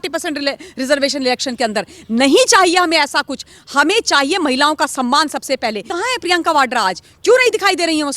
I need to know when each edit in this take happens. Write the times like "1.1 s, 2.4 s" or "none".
5.9 s